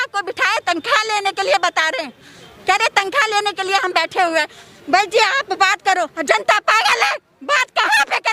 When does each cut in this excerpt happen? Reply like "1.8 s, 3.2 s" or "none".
none